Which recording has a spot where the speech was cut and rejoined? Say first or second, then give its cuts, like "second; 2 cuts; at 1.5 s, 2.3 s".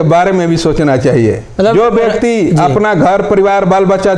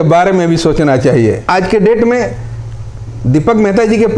second; 1 cut; at 1.4 s